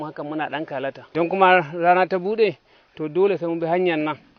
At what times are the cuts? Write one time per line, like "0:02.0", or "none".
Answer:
0:01.0